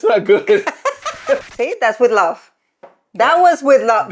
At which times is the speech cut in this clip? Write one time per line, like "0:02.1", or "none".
0:01.4

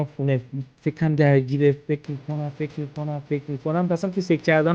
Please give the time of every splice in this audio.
none

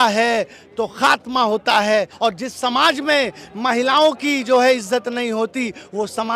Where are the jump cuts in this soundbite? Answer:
0:02.1

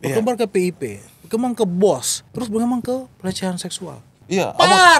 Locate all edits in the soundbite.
0:02.2
0:04.2

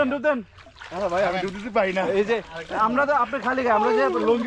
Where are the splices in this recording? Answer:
none

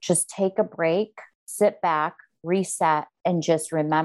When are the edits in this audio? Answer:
0:03.1

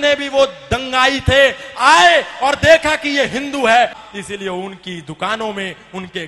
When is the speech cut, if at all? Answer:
0:04.0

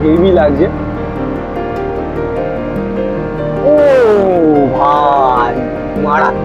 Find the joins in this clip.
none

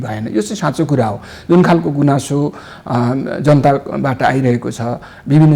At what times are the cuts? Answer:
none

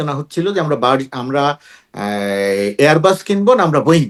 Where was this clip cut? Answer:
none

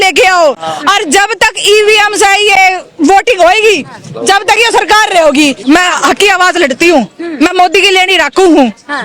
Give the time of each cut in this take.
0:05.6

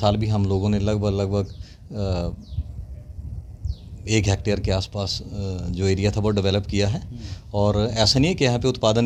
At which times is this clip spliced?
none

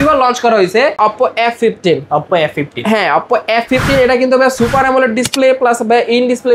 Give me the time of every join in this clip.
0:01.0

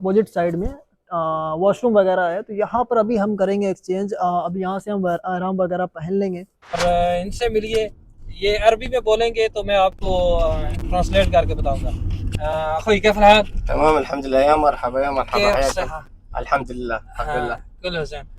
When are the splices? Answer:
0:06.8

